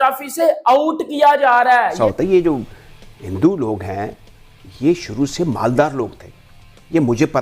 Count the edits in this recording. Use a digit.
1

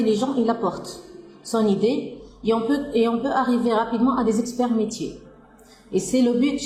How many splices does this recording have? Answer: 0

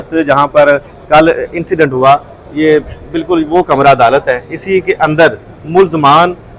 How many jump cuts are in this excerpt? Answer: 0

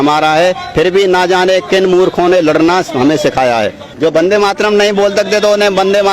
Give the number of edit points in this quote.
1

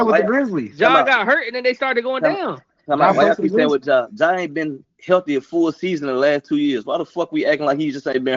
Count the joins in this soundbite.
0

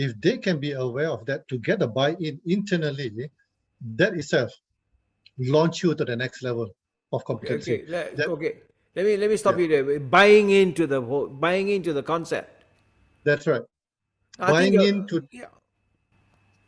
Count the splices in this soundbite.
0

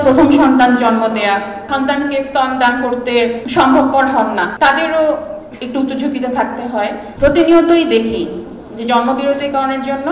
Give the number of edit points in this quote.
4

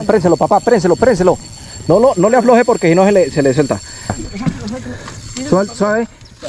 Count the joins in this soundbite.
1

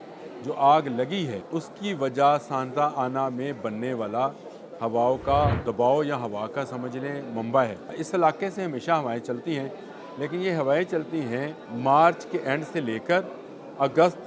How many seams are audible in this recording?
4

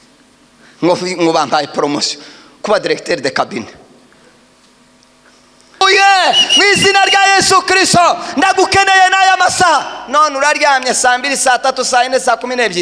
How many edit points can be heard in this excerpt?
1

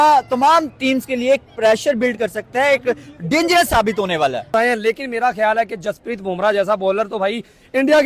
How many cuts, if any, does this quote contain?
1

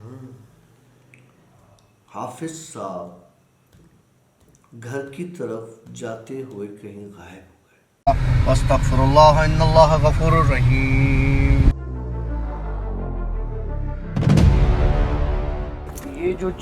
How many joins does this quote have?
1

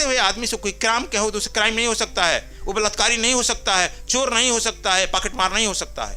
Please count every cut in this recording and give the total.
0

